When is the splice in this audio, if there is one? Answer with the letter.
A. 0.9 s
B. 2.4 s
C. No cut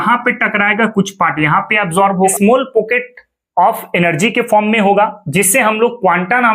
B